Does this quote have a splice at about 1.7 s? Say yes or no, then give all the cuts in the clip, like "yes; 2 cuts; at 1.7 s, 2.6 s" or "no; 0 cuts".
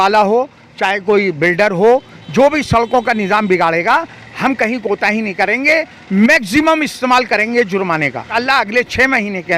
no; 1 cut; at 8.3 s